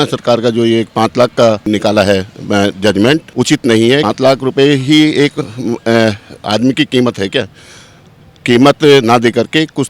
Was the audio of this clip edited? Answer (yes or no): yes